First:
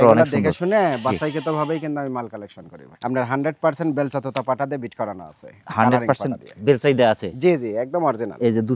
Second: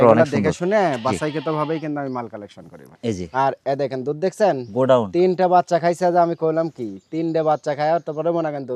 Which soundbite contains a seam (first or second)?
first